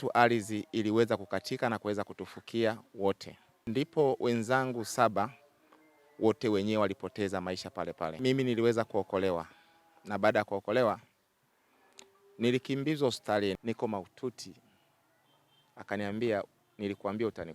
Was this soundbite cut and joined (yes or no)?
yes